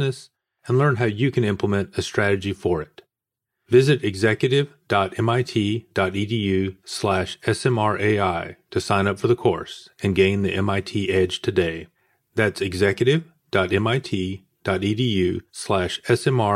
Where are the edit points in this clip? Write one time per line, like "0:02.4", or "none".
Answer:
none